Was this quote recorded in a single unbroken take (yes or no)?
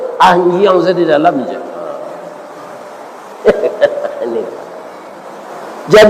yes